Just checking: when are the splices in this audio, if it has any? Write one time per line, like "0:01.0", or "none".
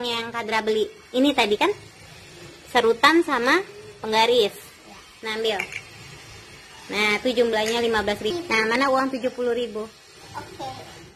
0:08.3

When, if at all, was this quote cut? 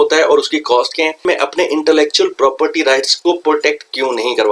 0:01.2
0:03.1

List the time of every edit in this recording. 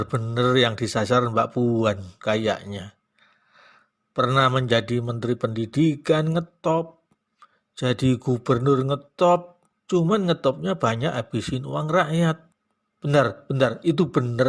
none

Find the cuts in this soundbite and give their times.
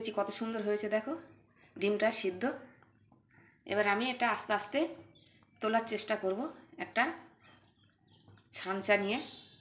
none

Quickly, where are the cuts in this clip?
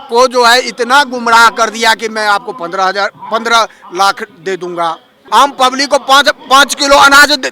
0:05.1

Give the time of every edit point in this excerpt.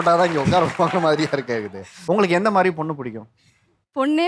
0:02.0

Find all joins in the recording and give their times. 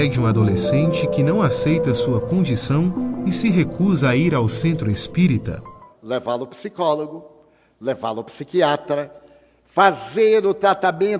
0:07.9

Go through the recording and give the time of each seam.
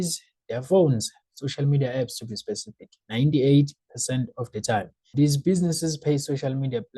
0:05.1

